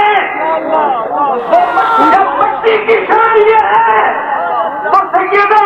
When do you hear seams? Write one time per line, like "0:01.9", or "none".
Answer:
0:01.9